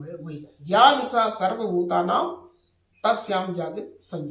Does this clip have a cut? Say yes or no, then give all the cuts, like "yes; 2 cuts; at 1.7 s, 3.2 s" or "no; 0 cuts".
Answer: no; 0 cuts